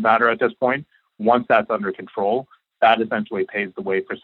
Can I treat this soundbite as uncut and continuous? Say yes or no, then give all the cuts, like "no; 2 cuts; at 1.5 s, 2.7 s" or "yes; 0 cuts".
yes; 0 cuts